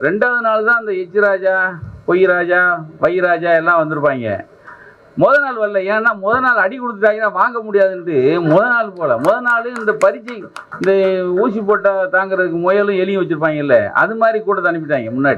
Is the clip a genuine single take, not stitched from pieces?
yes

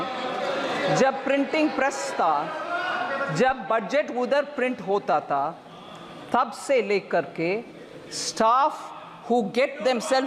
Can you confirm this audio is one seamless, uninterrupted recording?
yes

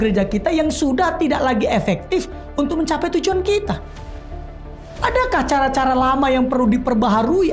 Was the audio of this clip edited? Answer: no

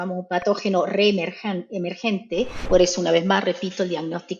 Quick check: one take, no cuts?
no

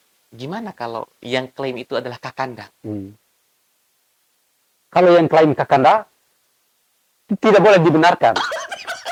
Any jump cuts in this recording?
no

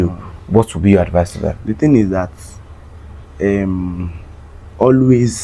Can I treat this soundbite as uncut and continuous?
yes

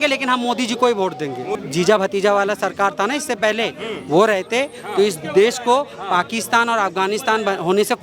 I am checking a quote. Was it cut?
yes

